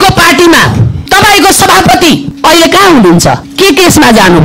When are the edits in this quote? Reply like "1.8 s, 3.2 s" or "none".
0.9 s, 2.3 s, 3.4 s